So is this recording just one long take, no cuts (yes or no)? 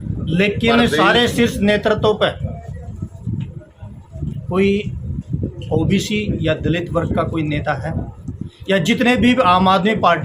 yes